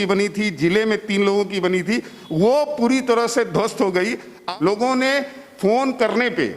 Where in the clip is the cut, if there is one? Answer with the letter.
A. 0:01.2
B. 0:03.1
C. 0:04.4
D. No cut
C